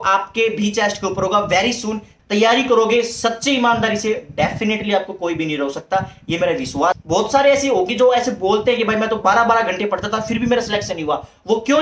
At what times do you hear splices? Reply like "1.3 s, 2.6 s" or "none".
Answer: 2.1 s, 7.0 s